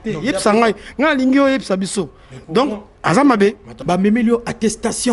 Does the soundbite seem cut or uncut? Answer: cut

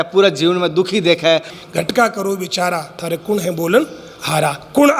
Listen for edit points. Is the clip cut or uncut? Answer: cut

